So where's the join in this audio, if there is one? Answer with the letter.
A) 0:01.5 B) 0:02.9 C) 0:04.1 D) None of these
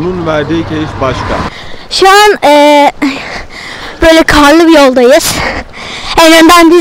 A